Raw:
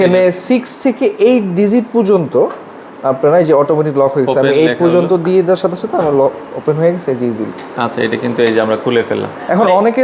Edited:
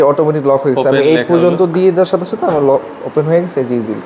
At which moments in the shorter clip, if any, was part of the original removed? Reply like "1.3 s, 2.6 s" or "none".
none

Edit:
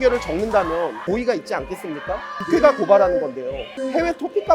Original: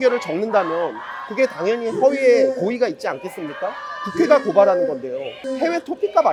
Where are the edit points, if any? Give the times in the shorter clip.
1.0 s, 2.3 s

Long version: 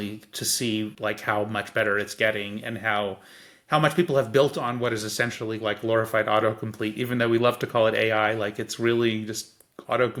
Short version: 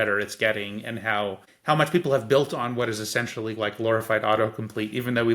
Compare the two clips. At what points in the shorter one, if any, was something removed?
1.5 s

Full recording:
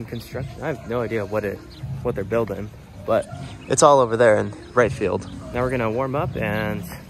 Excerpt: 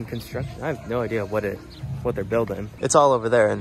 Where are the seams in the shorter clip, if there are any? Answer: 2.7 s

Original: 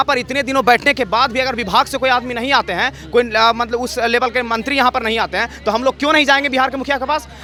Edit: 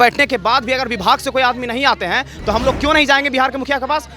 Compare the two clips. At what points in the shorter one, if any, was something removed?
2.3 s

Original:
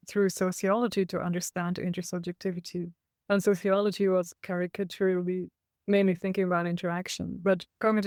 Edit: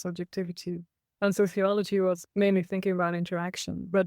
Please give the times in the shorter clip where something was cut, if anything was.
2.2 s

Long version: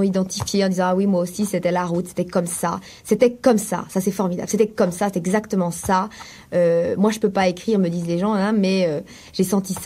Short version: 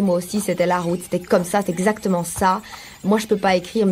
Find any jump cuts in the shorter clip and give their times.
1.2 s, 3.0 s

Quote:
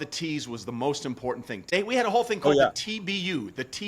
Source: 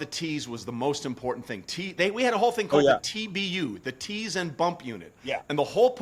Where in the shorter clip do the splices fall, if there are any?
1.6 s

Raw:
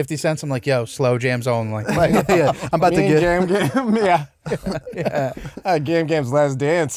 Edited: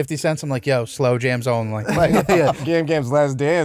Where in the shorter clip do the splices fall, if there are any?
2.6 s

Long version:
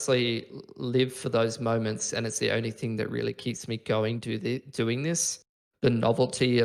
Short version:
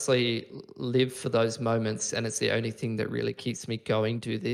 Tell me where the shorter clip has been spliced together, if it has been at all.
none

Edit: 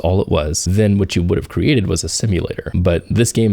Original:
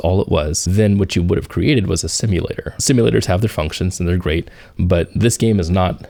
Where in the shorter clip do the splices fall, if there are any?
2.6 s

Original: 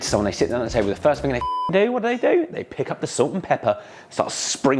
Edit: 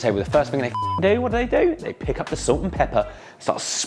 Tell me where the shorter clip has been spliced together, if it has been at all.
none

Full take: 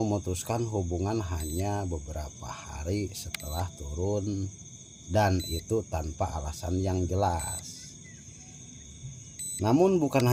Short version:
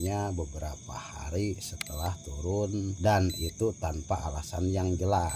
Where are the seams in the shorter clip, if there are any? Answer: 2.9 s

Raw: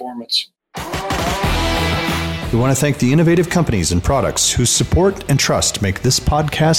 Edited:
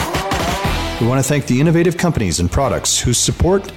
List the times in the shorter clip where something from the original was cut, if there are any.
0.9 s

